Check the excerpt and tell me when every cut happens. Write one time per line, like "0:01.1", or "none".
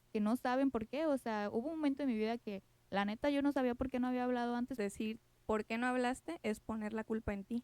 0:04.8